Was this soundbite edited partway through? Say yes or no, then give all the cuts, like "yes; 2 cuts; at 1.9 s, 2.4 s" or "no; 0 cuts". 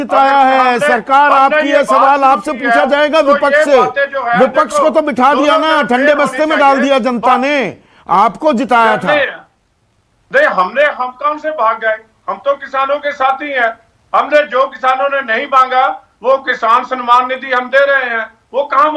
no; 0 cuts